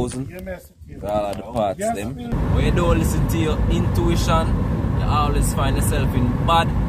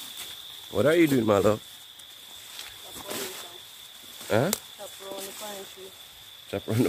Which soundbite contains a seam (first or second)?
first